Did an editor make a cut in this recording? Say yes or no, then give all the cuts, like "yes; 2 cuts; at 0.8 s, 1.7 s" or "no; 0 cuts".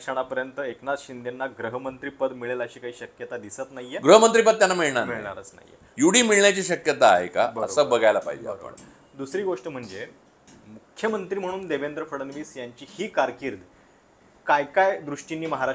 no; 0 cuts